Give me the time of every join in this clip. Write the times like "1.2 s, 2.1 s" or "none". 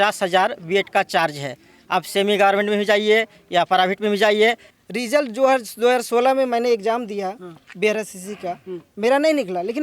4.7 s